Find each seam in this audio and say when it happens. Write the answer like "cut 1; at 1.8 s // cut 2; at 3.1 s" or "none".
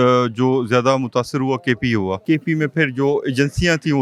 cut 1; at 2.2 s